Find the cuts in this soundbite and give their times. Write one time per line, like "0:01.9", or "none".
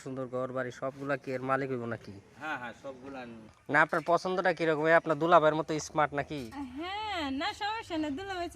0:03.5